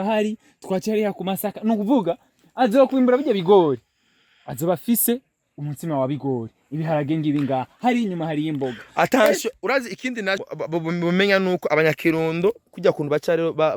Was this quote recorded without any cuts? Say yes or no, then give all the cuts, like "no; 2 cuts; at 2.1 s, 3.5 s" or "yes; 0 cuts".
yes; 0 cuts